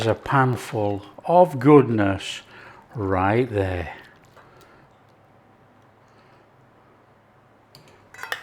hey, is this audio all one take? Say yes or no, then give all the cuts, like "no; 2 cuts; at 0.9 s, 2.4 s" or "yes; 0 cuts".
yes; 0 cuts